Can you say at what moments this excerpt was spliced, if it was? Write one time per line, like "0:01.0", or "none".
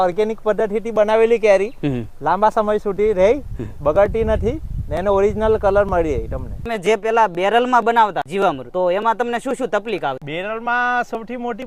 0:06.7
0:08.3
0:10.2